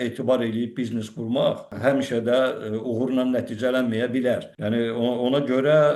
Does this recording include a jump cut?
yes; 2 cuts; at 1.7 s, 4.5 s

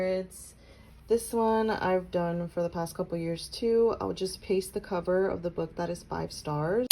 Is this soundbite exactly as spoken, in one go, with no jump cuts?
yes; 0 cuts

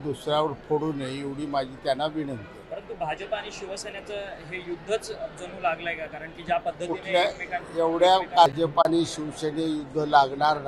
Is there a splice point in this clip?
yes; 1 cut; at 8.5 s

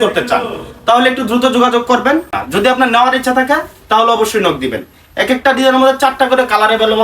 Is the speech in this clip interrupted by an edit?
yes; 1 cut; at 2.4 s

